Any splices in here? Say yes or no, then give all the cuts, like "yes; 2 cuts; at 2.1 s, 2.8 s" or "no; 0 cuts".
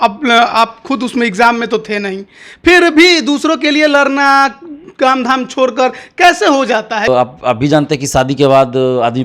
yes; 1 cut; at 7.1 s